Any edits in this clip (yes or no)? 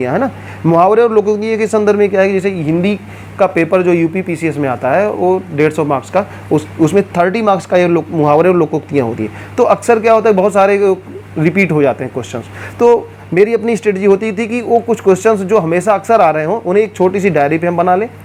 no